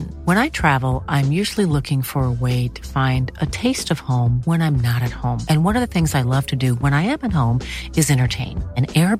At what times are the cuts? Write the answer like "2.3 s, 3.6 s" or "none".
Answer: none